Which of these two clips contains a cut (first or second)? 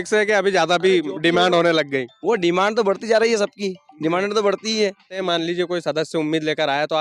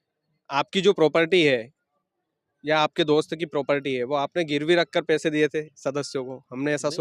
first